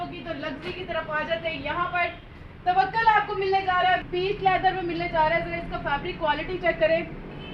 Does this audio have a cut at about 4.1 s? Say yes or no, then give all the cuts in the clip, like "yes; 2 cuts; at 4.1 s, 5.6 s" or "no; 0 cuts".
yes; 1 cut; at 4.1 s